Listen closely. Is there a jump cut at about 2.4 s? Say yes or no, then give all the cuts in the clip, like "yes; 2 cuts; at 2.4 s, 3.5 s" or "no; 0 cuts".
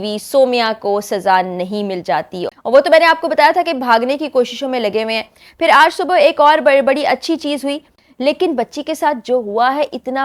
yes; 2 cuts; at 2.4 s, 7.9 s